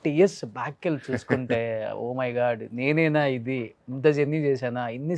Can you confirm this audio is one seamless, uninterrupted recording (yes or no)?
yes